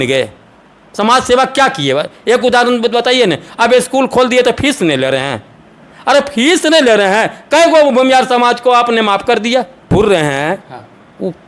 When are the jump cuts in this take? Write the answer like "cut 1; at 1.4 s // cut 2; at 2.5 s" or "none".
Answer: cut 1; at 9.9 s